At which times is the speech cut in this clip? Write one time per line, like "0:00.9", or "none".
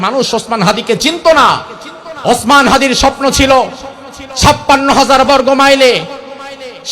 none